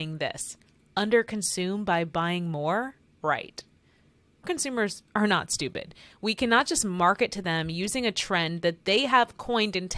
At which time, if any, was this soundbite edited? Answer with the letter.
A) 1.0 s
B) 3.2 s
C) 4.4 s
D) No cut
C